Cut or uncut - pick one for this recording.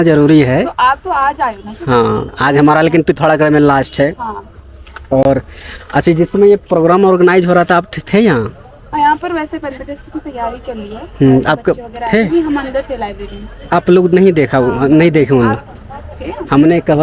uncut